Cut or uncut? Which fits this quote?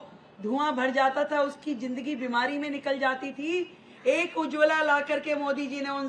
uncut